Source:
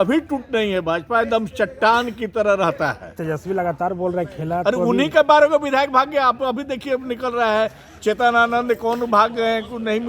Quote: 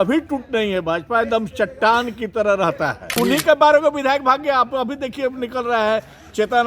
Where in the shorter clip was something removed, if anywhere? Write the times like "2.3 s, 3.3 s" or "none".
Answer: 3.2 s